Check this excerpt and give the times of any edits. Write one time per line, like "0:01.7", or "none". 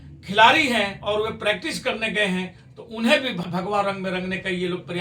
0:03.4